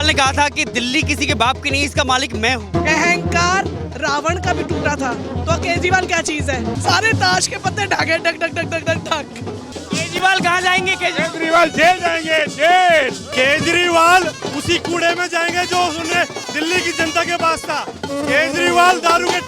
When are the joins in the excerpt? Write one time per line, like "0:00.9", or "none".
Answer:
0:02.7
0:06.7
0:09.7
0:13.3